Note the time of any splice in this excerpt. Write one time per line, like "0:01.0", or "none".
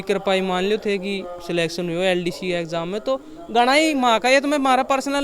none